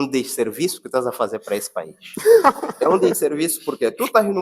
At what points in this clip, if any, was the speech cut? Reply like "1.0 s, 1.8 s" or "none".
none